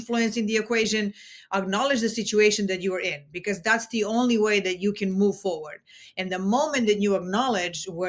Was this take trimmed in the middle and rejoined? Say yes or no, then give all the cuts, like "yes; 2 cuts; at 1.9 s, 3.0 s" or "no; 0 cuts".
no; 0 cuts